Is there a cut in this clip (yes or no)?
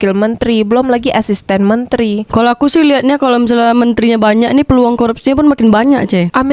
yes